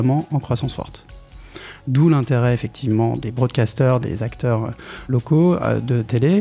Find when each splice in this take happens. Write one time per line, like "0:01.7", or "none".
0:01.4